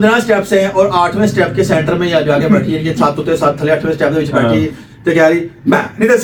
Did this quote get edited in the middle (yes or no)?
no